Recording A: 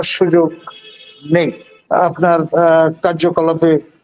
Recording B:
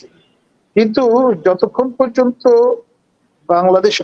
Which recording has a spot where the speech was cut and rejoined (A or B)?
A